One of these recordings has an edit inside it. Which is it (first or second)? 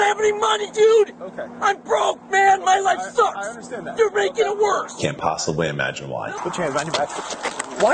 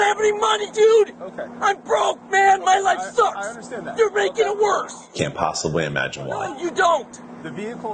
first